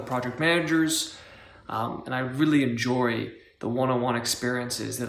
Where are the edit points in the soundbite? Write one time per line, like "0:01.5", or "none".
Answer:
none